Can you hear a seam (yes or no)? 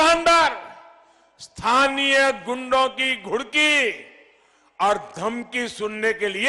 no